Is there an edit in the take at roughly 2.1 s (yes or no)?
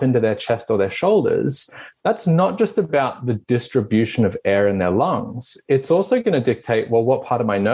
no